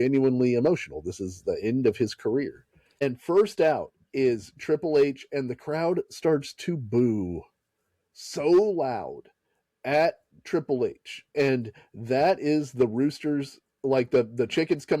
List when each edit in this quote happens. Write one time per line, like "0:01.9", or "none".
0:03.0